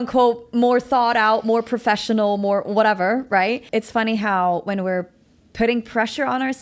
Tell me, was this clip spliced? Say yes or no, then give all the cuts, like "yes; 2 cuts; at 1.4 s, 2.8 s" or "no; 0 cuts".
yes; 1 cut; at 3.6 s